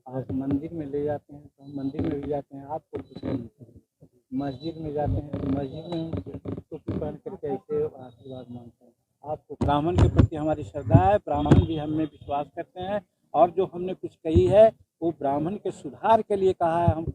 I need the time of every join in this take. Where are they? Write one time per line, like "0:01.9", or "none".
0:09.7